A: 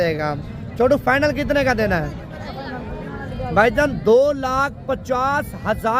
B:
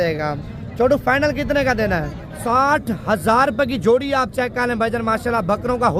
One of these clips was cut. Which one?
B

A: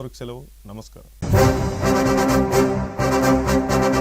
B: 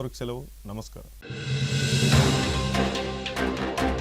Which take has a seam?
B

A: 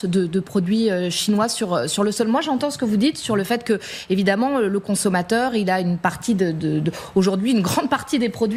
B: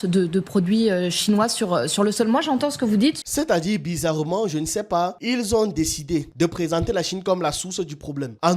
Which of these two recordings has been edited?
B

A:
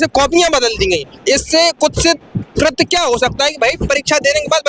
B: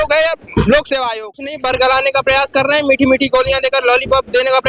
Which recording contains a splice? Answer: B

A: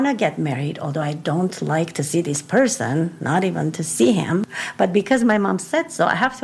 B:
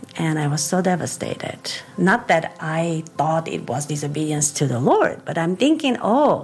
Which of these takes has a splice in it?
A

